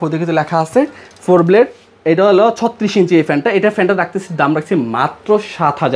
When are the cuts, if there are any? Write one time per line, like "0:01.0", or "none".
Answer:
none